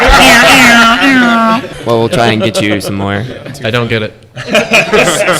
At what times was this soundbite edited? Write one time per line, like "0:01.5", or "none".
0:01.7
0:03.6

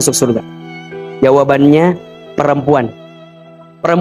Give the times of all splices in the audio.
none

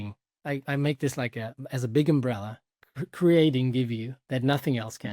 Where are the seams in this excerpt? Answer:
0:04.1

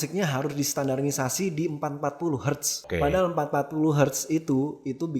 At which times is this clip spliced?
0:02.8

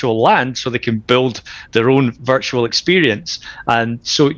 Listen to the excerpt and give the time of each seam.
none

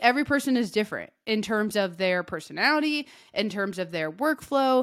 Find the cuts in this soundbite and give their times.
none

